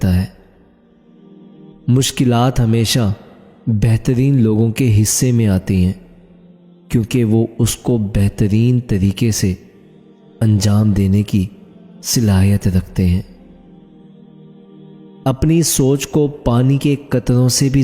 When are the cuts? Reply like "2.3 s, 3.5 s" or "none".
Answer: 13.3 s, 15.0 s